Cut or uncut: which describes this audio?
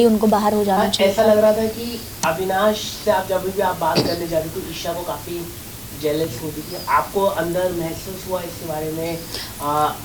uncut